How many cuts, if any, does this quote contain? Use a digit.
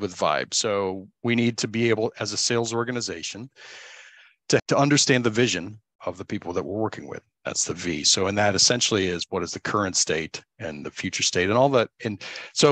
3